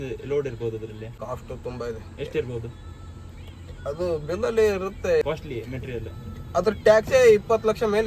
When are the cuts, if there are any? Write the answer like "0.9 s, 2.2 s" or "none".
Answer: 1.1 s, 5.2 s